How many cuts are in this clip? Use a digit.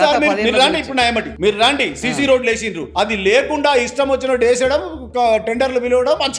1